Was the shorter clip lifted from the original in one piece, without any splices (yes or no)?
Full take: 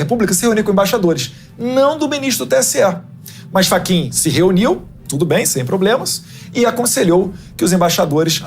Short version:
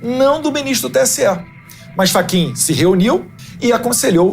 no